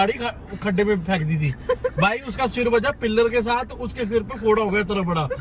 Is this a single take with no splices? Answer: yes; 0 cuts

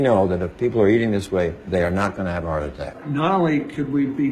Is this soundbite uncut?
no; 1 cut; at 2.9 s

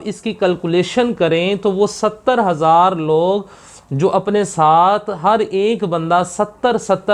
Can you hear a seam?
no; 0 cuts

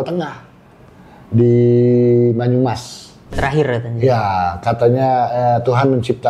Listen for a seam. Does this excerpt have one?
yes; 1 cut; at 3.4 s

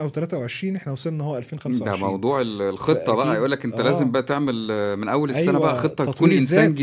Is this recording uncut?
yes; 0 cuts

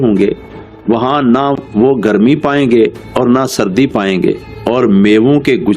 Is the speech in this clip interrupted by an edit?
yes; 1 cut; at 4.4 s

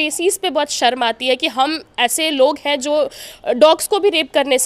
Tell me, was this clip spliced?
no; 0 cuts

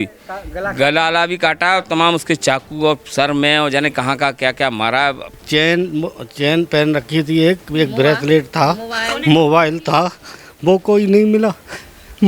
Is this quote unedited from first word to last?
no; 1 cut; at 5.3 s

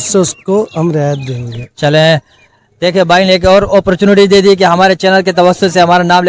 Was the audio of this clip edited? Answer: no; 0 cuts

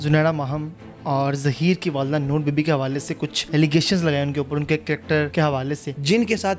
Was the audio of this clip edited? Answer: yes; 2 cuts; at 3.3 s, 5.6 s

